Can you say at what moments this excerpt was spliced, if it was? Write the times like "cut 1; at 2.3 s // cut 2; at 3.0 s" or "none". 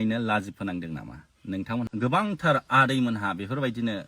cut 1; at 1.9 s